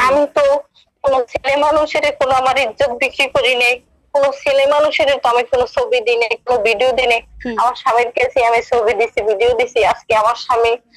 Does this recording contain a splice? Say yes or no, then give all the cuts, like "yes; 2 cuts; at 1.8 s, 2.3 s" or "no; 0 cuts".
no; 0 cuts